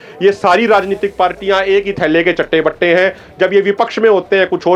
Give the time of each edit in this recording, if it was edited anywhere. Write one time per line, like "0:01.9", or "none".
none